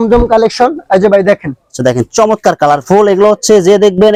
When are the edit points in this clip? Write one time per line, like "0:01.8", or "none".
none

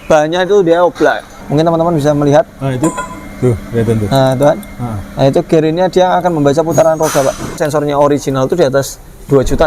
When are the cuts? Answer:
0:01.4
0:07.6

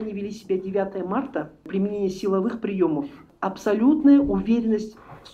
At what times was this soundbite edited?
0:01.7
0:03.3

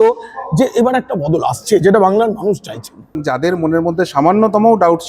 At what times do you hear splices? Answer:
0:03.3

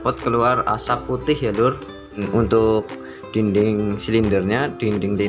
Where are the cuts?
0:02.2

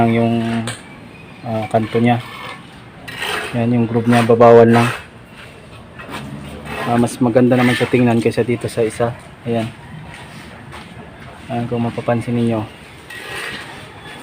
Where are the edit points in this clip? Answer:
0:06.2

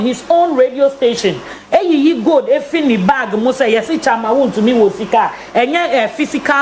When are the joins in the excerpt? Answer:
none

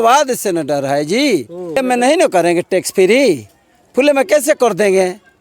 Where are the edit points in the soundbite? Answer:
0:01.8

